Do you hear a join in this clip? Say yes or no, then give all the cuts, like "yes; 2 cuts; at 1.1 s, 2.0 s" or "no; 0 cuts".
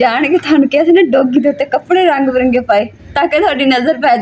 no; 0 cuts